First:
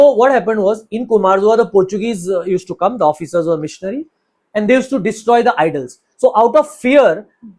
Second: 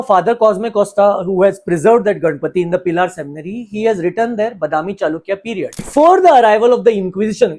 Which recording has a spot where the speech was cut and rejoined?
second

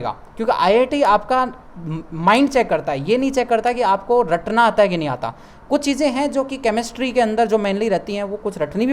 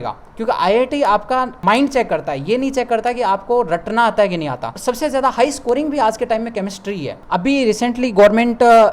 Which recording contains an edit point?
second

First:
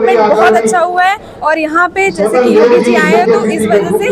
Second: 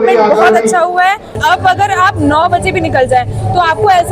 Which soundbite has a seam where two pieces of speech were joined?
second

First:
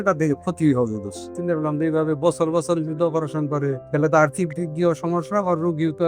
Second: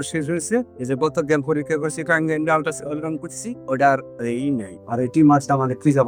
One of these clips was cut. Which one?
first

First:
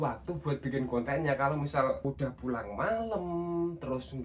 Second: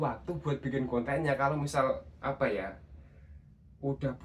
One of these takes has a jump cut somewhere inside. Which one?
first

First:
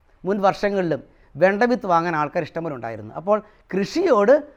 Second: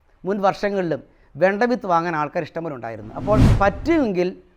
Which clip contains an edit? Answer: second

